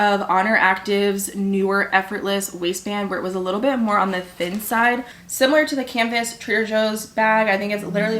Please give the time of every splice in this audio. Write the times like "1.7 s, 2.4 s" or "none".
5.2 s

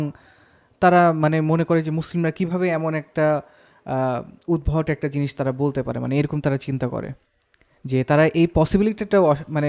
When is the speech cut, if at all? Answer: none

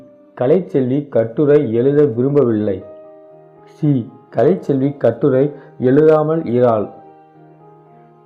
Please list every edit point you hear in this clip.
none

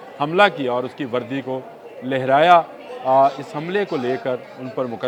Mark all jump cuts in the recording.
none

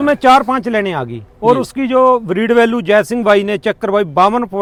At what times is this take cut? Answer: none

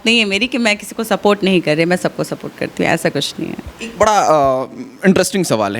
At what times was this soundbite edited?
none

